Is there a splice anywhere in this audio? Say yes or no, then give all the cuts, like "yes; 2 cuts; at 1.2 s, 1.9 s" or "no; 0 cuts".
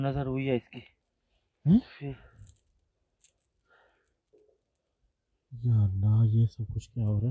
no; 0 cuts